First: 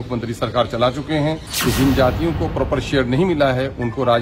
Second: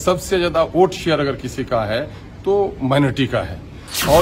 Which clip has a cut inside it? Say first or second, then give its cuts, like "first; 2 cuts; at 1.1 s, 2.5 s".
first; 1 cut; at 1.5 s